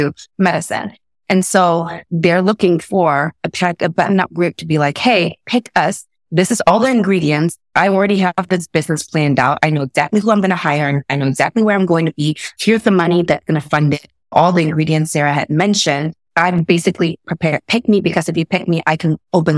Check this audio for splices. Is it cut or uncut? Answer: cut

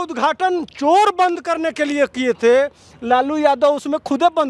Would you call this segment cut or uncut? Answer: uncut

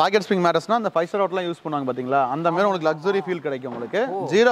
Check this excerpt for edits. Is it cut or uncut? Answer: uncut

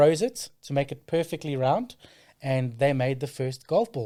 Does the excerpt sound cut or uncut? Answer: uncut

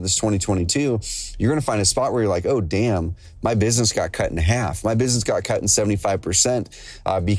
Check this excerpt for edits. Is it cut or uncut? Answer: uncut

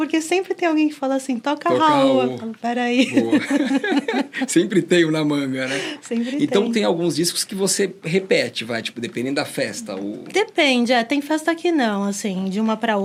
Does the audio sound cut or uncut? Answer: uncut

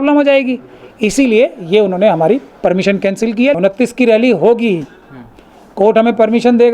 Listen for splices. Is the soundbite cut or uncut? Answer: cut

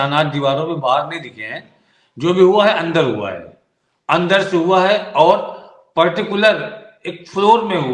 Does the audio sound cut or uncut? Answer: uncut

